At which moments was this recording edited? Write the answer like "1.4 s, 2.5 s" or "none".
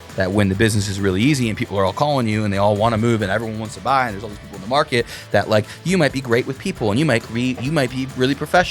none